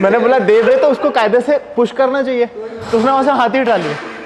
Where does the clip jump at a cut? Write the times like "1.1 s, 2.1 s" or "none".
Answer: none